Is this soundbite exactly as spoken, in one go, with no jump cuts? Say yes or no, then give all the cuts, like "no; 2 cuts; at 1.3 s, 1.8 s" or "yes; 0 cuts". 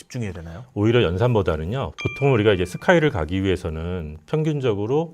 no; 1 cut; at 1.9 s